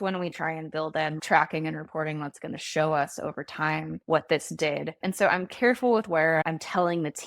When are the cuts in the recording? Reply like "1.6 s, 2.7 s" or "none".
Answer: 1.2 s, 3.9 s, 5.0 s, 6.4 s